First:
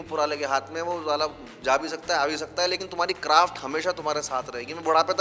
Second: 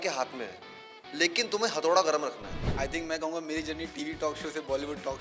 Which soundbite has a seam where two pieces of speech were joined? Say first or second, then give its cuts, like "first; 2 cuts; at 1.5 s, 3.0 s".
second; 1 cut; at 2.7 s